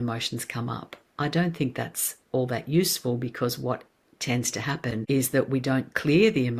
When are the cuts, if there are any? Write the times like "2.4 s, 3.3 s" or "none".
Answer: 5.0 s

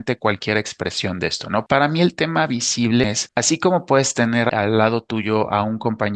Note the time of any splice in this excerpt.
1.7 s, 3.0 s, 4.5 s

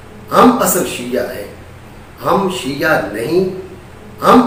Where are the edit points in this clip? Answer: none

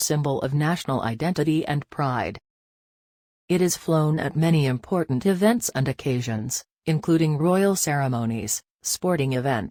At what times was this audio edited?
none

